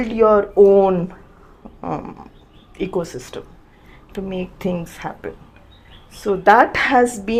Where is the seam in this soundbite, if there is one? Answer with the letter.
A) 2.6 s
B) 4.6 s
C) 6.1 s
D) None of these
D